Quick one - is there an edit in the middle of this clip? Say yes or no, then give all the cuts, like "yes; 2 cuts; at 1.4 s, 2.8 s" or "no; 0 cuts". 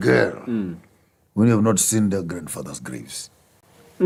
no; 0 cuts